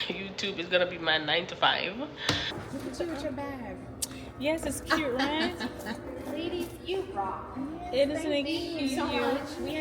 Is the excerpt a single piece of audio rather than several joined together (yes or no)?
no